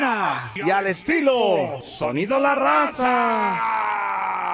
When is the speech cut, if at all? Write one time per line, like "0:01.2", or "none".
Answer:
0:03.4